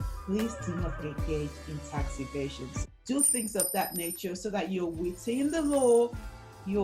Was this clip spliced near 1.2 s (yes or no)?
no